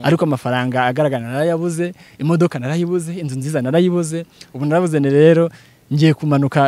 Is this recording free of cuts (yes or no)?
yes